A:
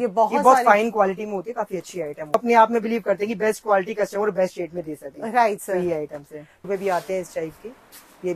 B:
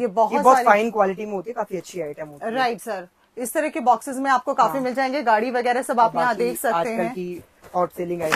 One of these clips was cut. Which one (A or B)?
A